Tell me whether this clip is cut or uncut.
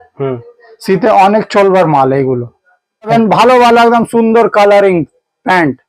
cut